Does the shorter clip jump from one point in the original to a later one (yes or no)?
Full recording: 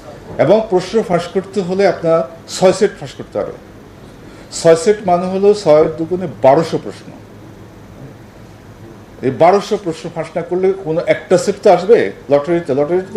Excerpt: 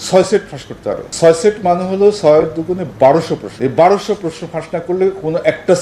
yes